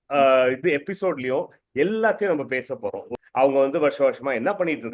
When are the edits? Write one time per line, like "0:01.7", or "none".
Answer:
0:03.1